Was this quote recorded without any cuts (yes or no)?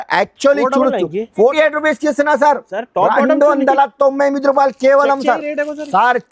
no